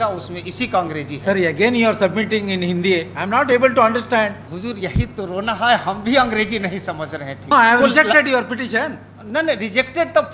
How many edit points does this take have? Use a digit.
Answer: 2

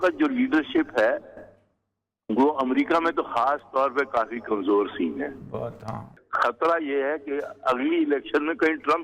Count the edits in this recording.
0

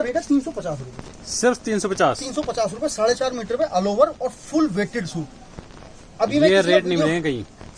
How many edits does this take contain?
0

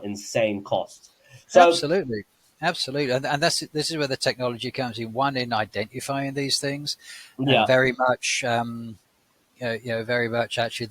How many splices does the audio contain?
1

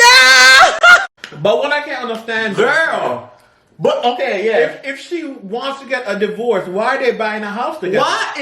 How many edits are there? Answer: 1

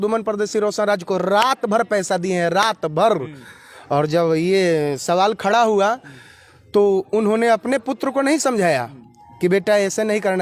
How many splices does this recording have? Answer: 0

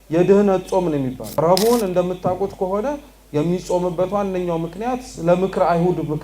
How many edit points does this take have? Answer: 1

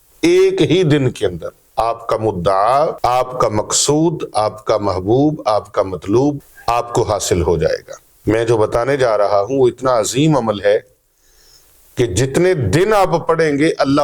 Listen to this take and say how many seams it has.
3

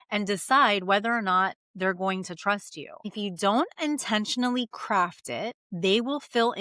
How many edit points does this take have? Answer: 2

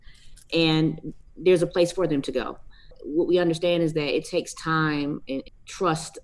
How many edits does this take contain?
3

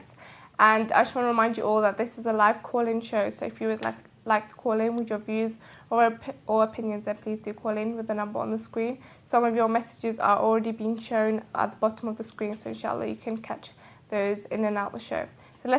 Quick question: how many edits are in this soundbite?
1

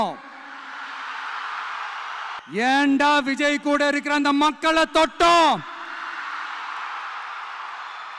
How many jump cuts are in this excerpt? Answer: 1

